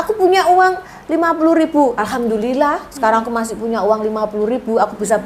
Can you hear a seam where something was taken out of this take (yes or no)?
no